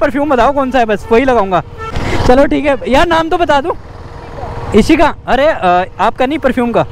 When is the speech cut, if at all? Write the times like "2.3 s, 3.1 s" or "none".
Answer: 1.9 s